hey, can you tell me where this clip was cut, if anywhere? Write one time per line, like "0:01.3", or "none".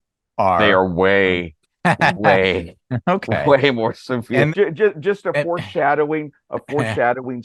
0:04.5